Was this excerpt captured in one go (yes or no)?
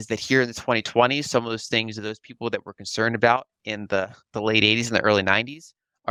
yes